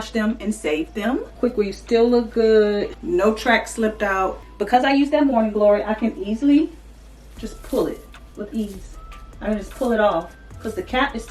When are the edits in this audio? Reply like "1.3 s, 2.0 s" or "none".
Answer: 1.3 s, 3.0 s, 4.4 s, 8.2 s